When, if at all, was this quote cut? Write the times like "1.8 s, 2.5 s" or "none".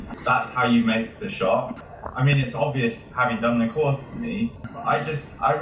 1.8 s, 4.7 s

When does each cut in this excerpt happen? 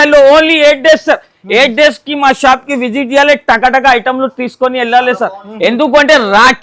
none

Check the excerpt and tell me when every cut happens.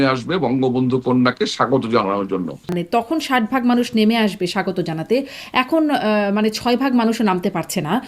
2.8 s

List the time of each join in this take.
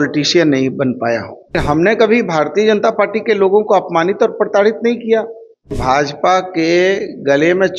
1.6 s, 5.8 s

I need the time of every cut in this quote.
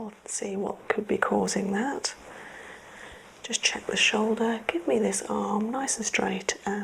none

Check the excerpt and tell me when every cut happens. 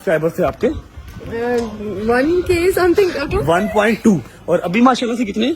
4.4 s

